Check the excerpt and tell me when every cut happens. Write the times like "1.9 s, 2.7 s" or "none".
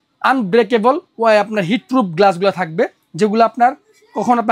none